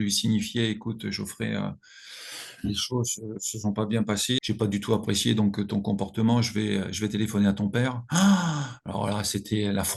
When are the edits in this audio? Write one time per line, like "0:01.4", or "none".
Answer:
none